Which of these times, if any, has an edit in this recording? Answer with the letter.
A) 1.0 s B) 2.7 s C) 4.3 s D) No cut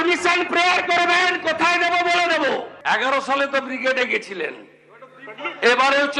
B